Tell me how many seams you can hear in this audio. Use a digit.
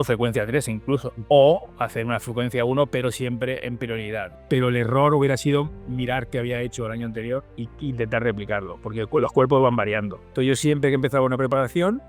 4